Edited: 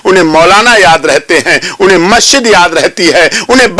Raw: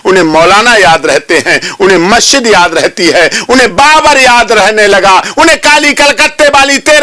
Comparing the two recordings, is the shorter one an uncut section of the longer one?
yes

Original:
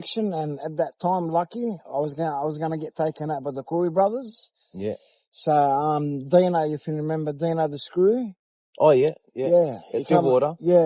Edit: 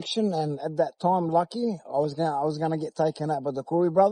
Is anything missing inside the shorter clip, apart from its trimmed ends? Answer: no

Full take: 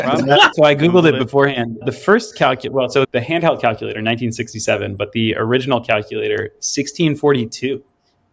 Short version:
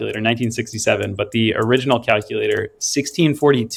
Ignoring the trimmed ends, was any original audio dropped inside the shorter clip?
no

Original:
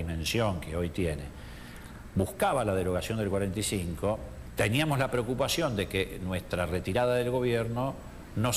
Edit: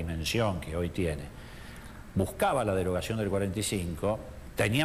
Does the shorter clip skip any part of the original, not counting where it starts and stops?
no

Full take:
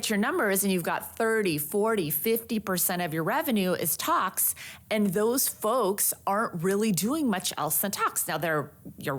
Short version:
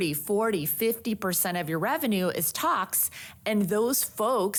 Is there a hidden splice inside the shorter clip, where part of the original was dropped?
no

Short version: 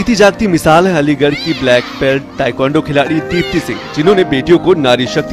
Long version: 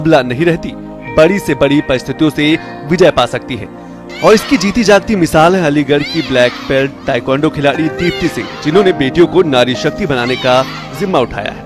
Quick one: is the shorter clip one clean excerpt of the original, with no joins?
yes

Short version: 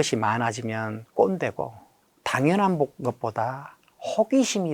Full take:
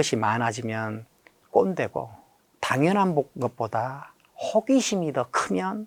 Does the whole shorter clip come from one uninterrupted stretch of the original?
no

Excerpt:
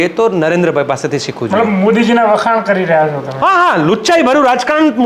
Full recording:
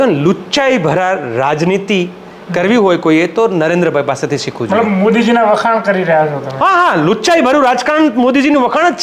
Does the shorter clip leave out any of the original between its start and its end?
no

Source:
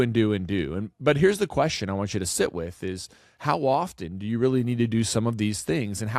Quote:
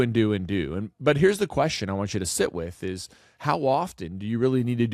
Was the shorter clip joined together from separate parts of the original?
no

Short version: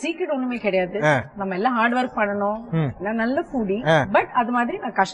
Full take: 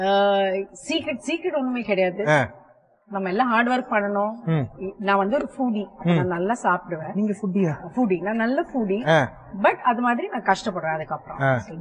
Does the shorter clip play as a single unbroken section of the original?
no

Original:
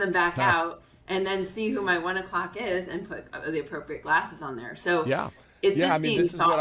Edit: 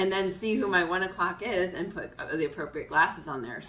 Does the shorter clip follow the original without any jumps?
yes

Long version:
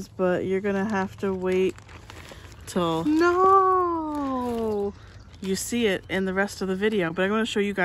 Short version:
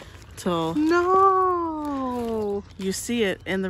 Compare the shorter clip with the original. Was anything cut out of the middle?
yes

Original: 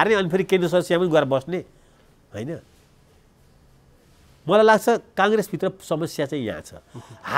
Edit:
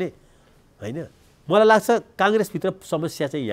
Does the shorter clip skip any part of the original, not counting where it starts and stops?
yes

